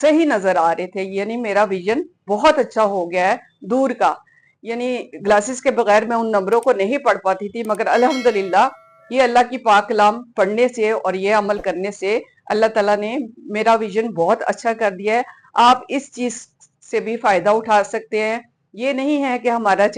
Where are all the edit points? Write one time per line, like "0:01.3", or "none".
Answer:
none